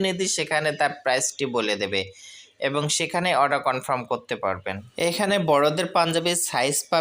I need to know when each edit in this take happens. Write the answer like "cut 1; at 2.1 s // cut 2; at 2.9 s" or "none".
cut 1; at 4.8 s